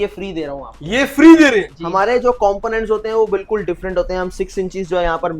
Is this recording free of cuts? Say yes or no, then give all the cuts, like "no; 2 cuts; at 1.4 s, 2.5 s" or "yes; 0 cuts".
no; 1 cut; at 1.8 s